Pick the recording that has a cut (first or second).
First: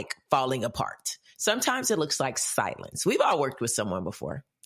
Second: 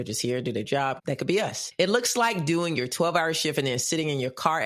second